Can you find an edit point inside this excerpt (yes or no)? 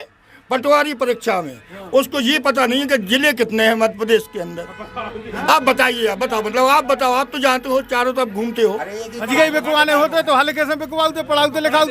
yes